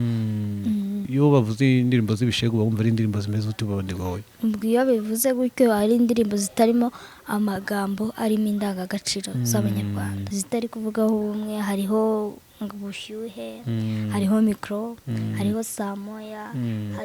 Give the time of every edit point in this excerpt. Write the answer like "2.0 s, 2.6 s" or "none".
1.1 s, 10.2 s